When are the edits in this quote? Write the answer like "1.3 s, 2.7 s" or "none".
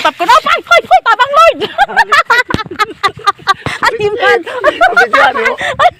0.9 s